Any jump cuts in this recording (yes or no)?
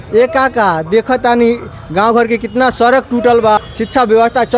yes